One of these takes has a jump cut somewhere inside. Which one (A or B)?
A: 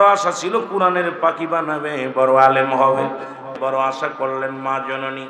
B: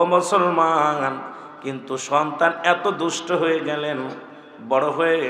A